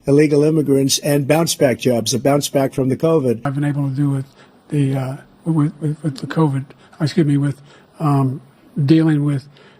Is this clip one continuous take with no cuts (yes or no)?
no